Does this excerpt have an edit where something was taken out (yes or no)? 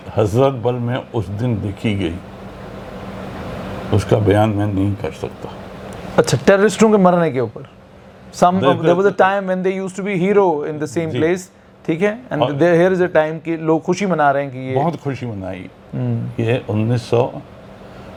no